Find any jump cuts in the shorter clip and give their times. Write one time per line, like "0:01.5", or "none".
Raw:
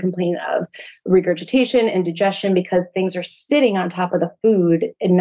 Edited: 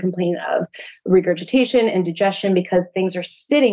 none